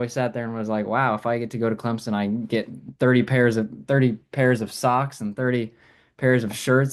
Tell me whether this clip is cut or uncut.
uncut